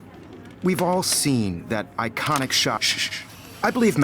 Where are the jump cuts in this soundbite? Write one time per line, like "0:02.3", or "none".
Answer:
0:02.9